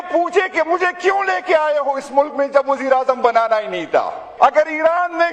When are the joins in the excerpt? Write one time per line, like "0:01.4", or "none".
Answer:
0:04.2